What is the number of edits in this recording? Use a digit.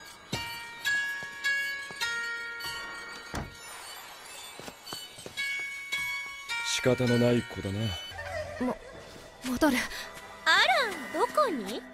0